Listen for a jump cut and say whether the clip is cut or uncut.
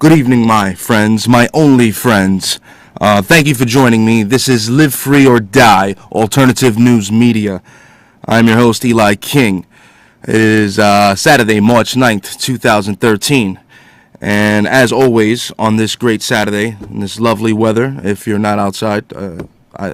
uncut